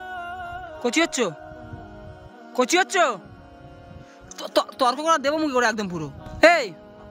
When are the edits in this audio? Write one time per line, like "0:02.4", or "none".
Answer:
0:06.2